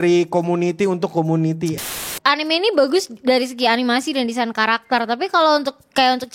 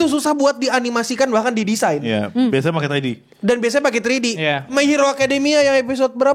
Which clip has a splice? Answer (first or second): first